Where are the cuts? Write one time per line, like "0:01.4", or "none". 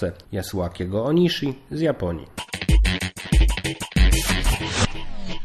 0:02.5

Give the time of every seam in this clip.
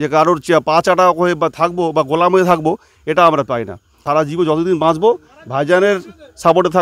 0:04.0

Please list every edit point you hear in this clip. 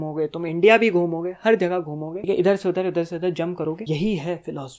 0:02.2
0:03.8

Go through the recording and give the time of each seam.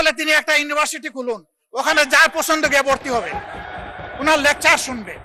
none

